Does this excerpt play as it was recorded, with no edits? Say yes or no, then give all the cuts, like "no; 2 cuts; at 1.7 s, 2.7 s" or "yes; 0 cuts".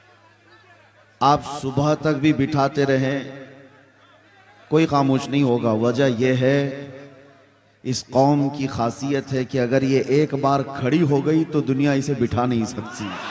yes; 0 cuts